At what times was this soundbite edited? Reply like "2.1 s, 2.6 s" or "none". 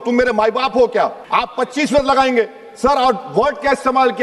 1.2 s